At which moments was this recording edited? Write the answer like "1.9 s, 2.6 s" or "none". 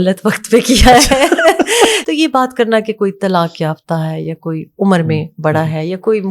2.0 s